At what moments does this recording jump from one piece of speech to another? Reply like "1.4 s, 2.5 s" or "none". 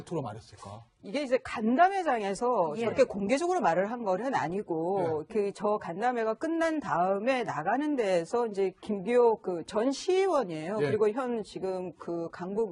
none